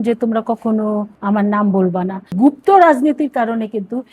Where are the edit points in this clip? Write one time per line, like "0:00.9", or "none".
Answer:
0:01.1
0:02.3